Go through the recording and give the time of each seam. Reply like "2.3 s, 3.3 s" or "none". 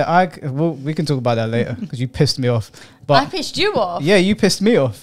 none